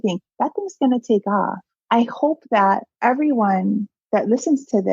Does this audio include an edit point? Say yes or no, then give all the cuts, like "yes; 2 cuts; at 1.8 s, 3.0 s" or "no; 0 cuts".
yes; 2 cuts; at 1.7 s, 2.9 s